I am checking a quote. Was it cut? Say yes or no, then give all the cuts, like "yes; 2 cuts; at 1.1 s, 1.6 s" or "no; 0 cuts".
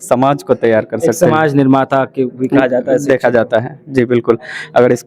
no; 0 cuts